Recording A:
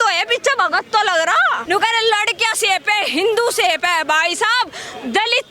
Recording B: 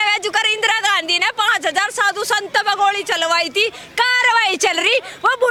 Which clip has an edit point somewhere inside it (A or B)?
A